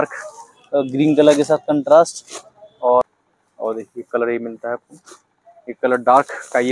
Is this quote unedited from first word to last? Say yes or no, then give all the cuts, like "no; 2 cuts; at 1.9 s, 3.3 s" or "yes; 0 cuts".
no; 1 cut; at 3.0 s